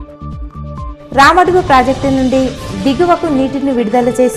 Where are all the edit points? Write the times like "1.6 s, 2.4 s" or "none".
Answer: 1.0 s